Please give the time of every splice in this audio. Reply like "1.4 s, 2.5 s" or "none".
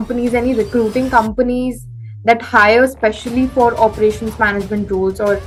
none

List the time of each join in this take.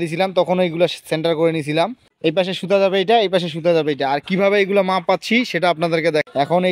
2.0 s

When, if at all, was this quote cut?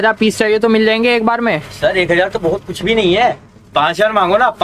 none

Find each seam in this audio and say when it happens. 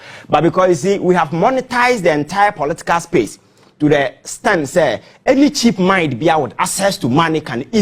none

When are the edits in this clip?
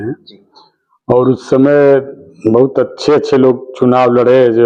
none

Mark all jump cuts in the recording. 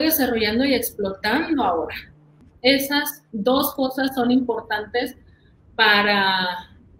2.3 s

